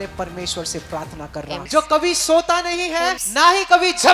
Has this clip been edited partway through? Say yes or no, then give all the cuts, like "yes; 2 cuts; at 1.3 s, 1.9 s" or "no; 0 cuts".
yes; 2 cuts; at 1.6 s, 3.2 s